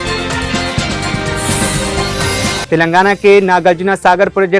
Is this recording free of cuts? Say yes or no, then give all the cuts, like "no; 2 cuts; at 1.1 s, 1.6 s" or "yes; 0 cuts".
no; 1 cut; at 2.6 s